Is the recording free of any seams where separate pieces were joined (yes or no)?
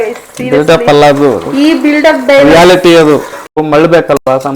no